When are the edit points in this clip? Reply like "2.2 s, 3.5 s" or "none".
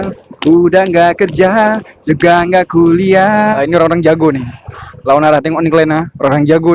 3.6 s